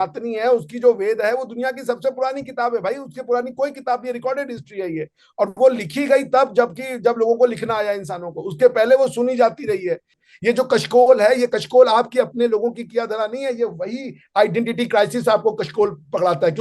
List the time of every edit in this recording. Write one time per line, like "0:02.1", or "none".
0:10.1